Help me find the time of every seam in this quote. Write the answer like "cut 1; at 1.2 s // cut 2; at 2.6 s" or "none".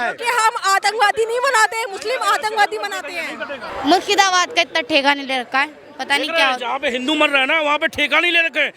cut 1; at 3.7 s